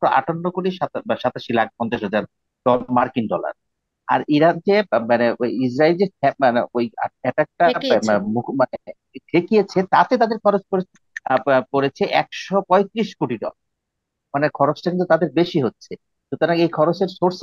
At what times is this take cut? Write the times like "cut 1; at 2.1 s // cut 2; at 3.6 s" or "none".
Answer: none